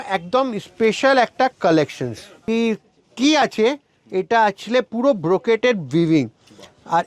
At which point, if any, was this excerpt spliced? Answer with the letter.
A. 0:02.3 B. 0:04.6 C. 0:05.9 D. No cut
A